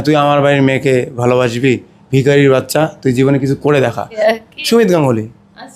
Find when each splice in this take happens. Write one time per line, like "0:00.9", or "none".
0:04.2